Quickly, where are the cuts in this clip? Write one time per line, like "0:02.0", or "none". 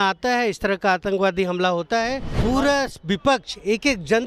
0:02.3